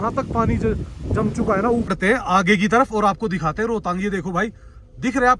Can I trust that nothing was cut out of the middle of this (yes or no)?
no